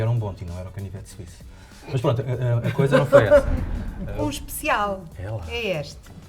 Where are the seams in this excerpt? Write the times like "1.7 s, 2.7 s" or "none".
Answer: 4.1 s

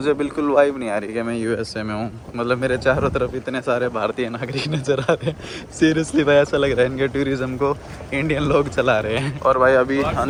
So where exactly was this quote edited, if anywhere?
none

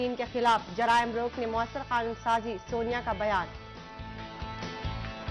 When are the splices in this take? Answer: 4.3 s

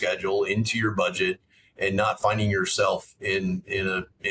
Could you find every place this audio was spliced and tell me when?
none

